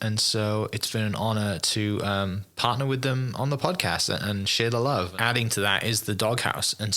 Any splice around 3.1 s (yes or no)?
no